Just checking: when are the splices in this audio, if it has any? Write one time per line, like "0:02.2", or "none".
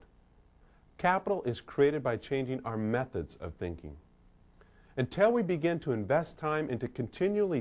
0:05.4